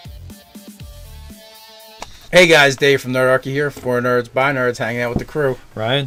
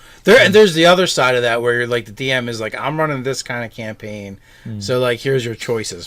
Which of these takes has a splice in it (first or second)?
second